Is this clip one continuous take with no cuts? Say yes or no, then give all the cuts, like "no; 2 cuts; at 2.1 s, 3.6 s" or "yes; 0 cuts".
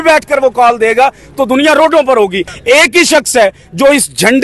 no; 1 cut; at 2.5 s